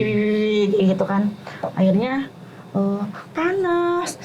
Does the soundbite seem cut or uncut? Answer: uncut